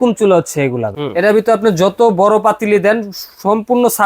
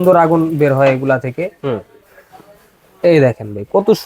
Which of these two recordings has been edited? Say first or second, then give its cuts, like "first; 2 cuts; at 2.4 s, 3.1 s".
first; 1 cut; at 0.9 s